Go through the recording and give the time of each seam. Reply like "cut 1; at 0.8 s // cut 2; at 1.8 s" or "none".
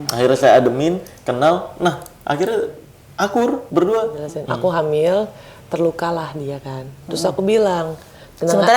cut 1; at 4.2 s